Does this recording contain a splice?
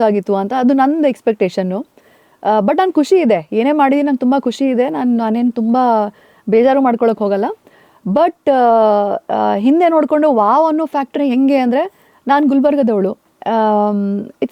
no; 0 cuts

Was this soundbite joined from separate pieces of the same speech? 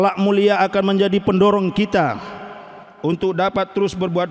no; 0 cuts

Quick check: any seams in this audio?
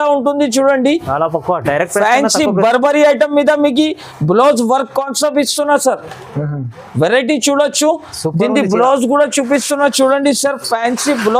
no; 0 cuts

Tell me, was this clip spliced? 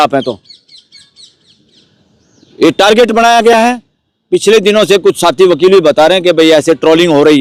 no; 0 cuts

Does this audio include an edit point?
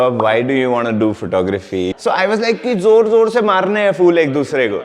yes; 1 cut; at 1.9 s

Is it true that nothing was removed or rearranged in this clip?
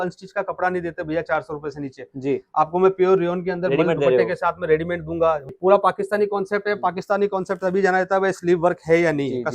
no; 1 cut; at 5.5 s

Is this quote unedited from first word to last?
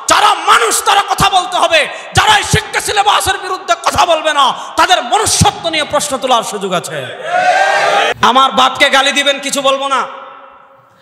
no; 1 cut; at 8.1 s

